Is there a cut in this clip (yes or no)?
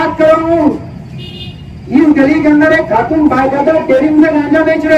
no